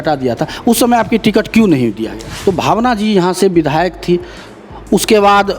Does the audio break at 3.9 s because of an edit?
no; 1 cut; at 2.2 s

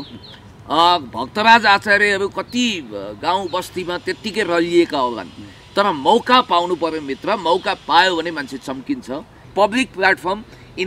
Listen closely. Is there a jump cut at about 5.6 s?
no; 1 cut; at 9.5 s

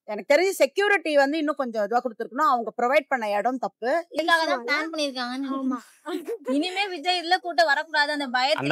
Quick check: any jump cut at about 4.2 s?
yes; 1 cut; at 4.2 s

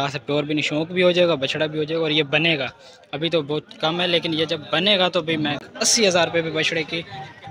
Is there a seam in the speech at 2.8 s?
no; 1 cut; at 5.7 s

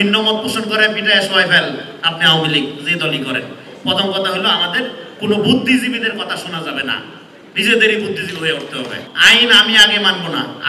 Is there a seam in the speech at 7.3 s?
no; 2 cuts; at 3.7 s, 9.1 s

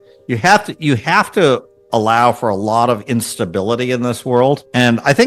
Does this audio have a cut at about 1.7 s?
no; 0 cuts

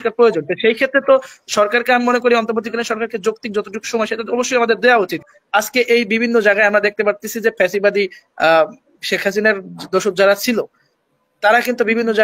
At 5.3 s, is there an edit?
yes; 1 cut; at 5.3 s

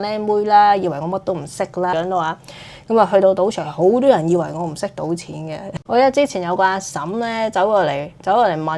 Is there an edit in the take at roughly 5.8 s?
yes; 2 cuts; at 1.9 s, 5.8 s

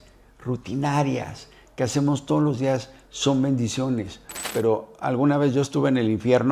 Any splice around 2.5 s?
no; 1 cut; at 4.4 s

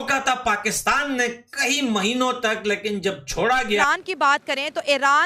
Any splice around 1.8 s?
no; 1 cut; at 3.8 s

